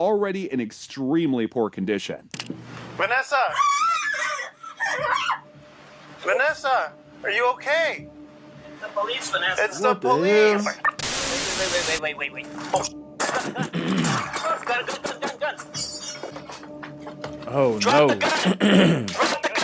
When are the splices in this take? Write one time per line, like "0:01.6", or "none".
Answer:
0:11.5